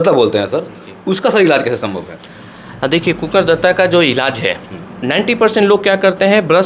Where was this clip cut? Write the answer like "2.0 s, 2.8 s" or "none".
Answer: 4.9 s